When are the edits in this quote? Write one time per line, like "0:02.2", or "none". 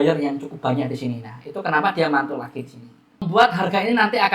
0:03.3